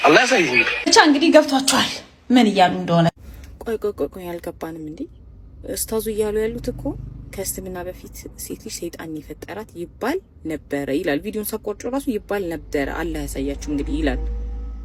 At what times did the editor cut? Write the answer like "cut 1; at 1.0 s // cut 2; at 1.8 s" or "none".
none